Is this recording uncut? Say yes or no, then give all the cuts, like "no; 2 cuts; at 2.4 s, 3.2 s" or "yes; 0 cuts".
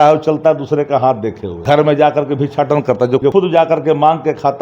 no; 2 cuts; at 1.5 s, 3.3 s